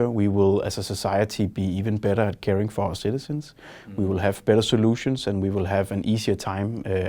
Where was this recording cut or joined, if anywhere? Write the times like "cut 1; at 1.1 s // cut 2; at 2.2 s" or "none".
none

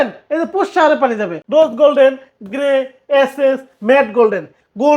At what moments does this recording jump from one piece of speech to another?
cut 1; at 1.3 s

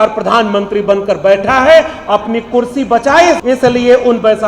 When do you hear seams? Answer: cut 1; at 3.4 s

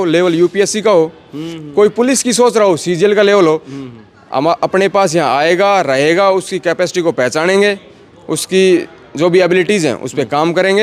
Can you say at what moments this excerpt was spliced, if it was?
none

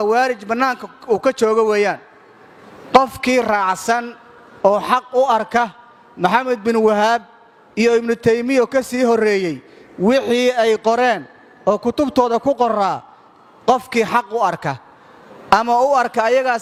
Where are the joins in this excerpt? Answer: none

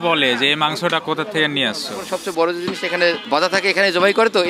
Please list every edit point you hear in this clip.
cut 1; at 2.1 s // cut 2; at 3.2 s

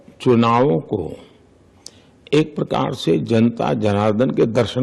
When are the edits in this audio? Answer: none

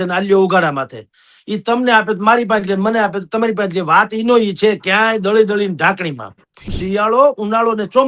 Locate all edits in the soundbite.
cut 1; at 6.8 s

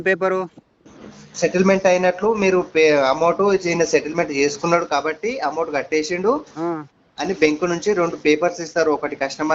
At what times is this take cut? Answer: none

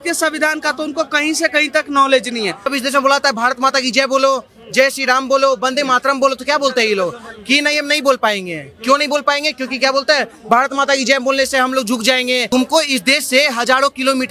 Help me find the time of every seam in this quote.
cut 1; at 2.7 s // cut 2; at 12.5 s

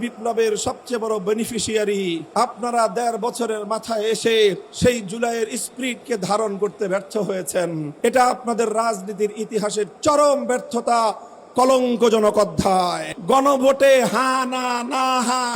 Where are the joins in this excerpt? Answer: cut 1; at 2.2 s // cut 2; at 4.7 s // cut 3; at 7.9 s // cut 4; at 13.1 s

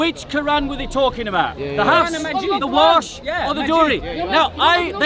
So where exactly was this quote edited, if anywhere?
none

